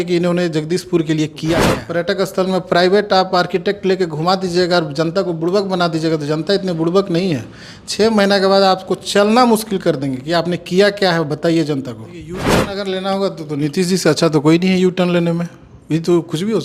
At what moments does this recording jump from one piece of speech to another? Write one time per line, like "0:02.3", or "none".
0:01.8
0:12.5

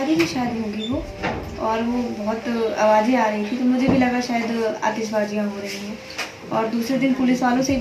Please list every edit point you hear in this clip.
none

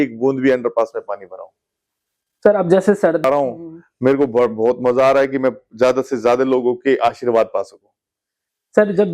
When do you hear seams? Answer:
0:03.2

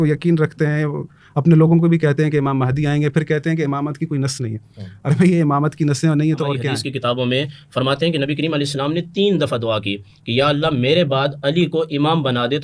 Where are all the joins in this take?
0:06.7

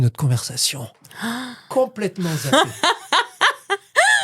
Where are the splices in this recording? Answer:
0:01.7

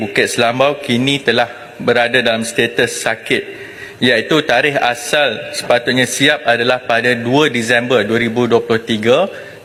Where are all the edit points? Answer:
none

